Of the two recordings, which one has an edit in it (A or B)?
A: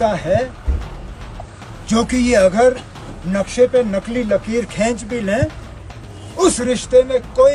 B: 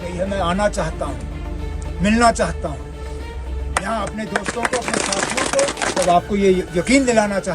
B